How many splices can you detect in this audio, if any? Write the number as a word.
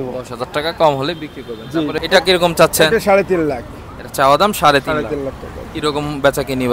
one